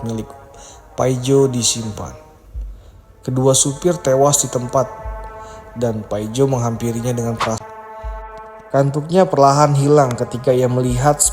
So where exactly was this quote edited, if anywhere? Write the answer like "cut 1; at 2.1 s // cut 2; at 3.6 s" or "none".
cut 1; at 7.6 s